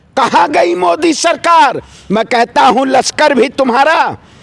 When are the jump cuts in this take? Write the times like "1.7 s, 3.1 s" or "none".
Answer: 1.9 s